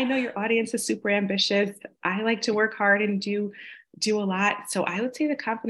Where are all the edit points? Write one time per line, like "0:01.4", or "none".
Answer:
none